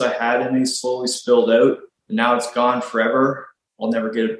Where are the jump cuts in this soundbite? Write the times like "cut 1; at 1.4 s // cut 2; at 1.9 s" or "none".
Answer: cut 1; at 1.9 s